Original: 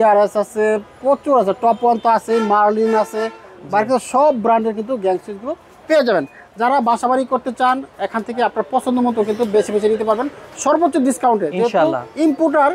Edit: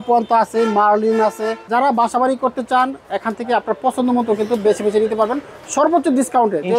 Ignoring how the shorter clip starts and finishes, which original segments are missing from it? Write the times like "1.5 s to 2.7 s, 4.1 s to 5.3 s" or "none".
3.3 s to 6.4 s